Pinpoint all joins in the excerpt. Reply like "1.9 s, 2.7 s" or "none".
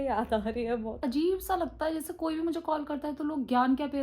1.0 s